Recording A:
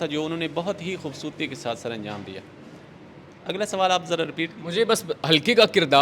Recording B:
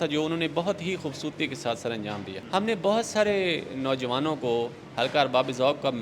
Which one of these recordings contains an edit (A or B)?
B